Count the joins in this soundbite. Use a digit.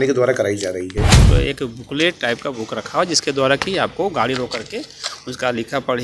1